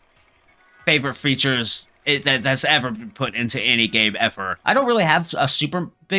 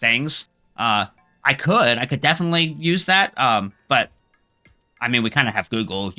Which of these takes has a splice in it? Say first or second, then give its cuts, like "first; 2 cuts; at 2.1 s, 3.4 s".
first; 1 cut; at 4.5 s